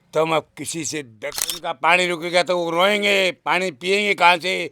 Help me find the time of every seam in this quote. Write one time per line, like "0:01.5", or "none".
0:01.1